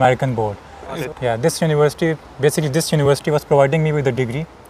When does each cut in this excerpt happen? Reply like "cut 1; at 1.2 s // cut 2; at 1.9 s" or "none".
cut 1; at 1.0 s